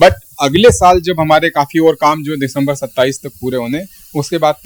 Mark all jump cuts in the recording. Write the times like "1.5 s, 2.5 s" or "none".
none